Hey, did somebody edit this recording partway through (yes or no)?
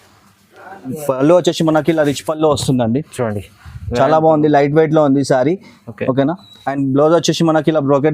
yes